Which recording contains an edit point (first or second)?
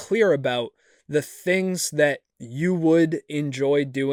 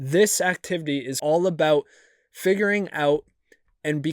second